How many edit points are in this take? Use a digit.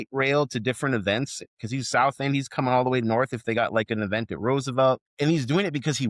1